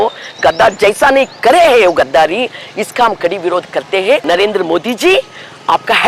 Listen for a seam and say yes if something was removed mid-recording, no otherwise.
yes